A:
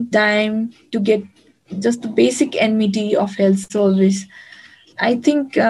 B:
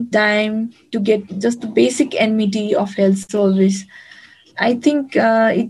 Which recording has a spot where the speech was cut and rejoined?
B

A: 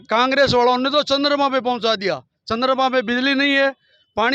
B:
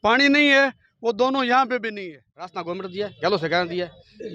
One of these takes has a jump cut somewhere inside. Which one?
B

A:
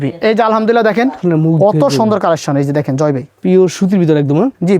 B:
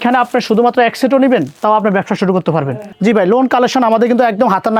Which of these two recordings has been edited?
A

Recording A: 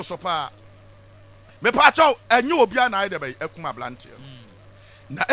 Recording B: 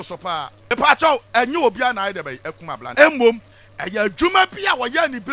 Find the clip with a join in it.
B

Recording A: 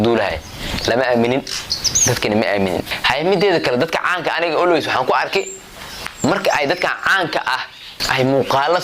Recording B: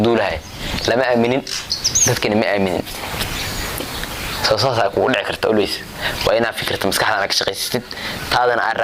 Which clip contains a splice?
A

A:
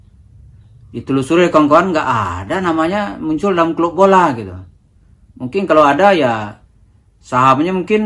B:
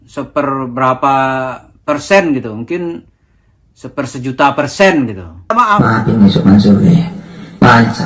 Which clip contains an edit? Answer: B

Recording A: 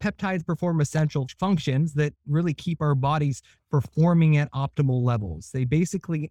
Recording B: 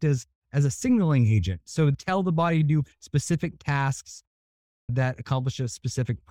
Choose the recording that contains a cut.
A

